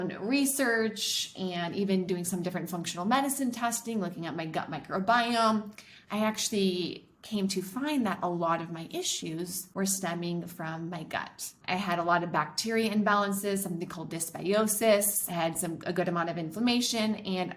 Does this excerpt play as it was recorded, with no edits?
no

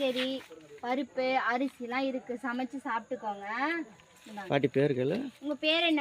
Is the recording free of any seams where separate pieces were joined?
yes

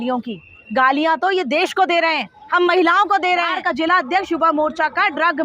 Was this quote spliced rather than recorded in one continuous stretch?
yes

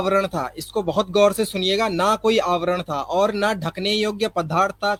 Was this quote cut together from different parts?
no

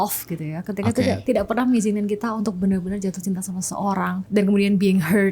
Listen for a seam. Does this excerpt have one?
yes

